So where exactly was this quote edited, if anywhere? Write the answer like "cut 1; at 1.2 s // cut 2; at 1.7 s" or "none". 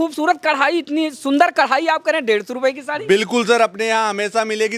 none